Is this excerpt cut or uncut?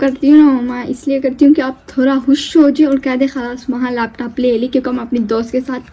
uncut